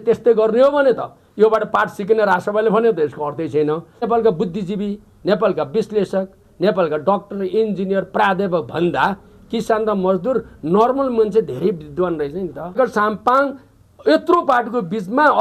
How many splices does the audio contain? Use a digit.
2